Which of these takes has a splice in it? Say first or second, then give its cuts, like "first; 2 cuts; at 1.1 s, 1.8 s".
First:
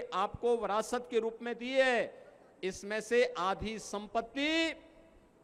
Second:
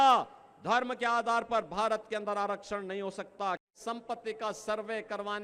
second; 1 cut; at 3.7 s